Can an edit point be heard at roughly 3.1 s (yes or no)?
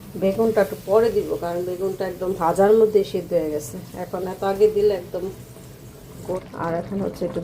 no